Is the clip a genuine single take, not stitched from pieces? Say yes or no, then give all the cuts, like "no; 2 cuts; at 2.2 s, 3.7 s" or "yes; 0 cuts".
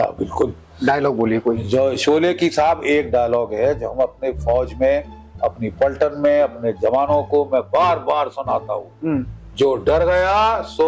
yes; 0 cuts